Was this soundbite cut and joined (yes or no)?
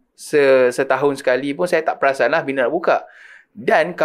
no